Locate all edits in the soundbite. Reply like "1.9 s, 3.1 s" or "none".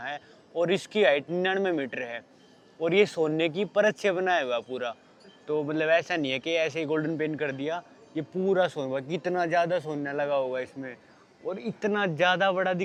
none